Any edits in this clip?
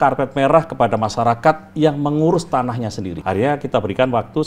yes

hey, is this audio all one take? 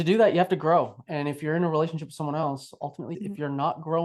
no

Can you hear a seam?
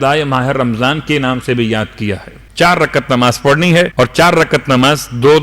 yes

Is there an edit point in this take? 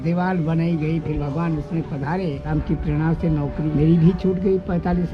yes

